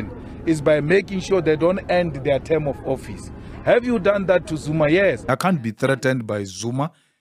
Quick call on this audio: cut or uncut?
cut